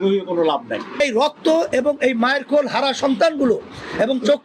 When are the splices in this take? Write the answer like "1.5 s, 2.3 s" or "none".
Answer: 1.0 s